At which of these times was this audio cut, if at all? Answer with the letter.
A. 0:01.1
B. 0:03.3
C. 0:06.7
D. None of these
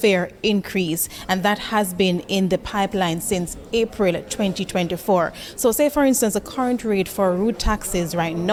D